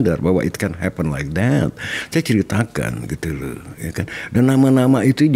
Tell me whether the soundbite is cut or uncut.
uncut